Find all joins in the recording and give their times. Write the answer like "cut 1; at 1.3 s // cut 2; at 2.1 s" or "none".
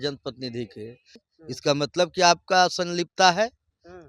cut 1; at 1.2 s